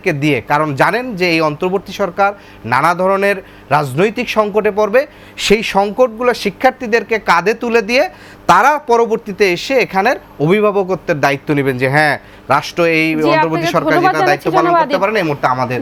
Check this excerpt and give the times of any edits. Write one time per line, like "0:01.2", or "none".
none